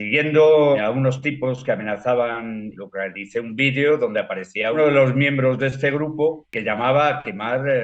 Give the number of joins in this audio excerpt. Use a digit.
3